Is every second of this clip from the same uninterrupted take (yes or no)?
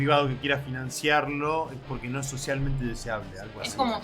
yes